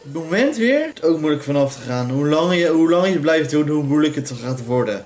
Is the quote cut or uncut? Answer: cut